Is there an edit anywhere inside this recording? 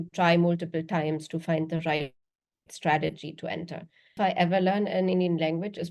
yes; 1 cut; at 4.1 s

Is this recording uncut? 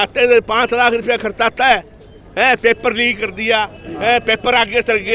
yes; 0 cuts

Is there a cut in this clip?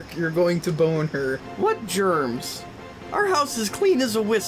yes; 1 cut; at 1.4 s

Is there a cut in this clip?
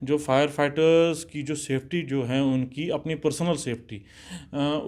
no; 0 cuts

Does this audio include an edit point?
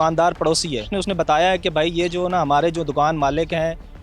yes; 1 cut; at 0.9 s

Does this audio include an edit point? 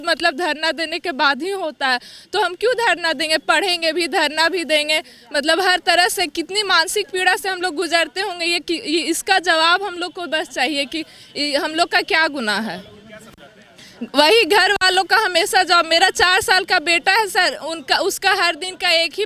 no; 0 cuts

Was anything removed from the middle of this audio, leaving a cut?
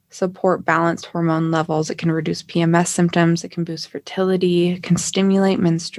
no; 0 cuts

